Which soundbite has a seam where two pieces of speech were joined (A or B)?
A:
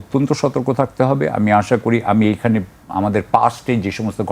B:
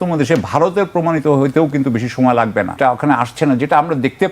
B